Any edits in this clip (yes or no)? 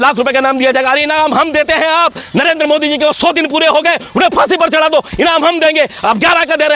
no